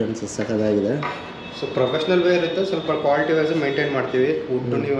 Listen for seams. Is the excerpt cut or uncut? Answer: uncut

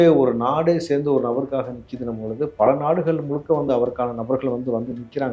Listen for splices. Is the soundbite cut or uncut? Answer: uncut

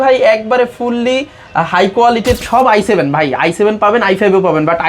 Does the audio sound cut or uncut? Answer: cut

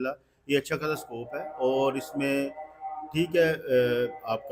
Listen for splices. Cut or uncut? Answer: uncut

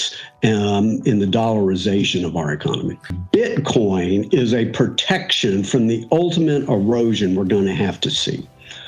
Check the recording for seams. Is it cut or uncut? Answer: cut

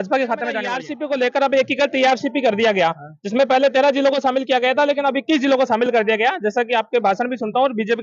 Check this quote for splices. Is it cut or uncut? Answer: cut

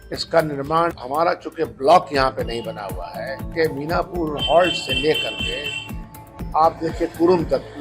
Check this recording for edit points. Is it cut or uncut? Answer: cut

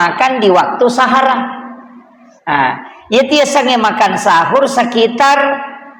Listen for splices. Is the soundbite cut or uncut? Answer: uncut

